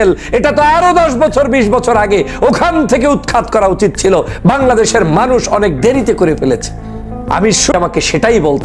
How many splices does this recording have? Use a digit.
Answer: 1